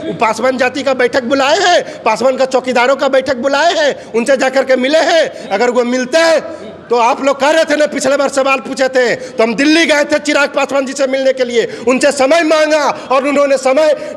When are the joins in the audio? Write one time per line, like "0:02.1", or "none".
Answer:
none